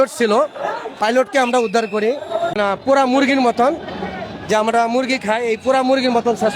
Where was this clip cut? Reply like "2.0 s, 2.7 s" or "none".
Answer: 2.6 s